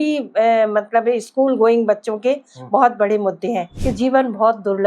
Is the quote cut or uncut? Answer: cut